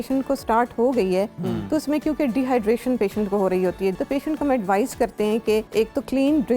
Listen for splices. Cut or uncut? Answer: cut